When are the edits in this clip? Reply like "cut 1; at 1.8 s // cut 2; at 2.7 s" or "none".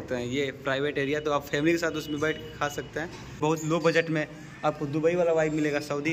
cut 1; at 3.4 s